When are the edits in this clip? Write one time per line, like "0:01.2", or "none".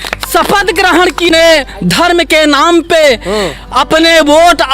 0:01.3